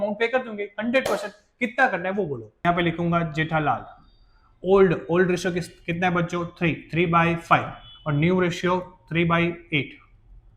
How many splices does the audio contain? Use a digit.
1